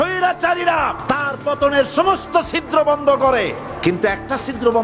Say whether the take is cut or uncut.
cut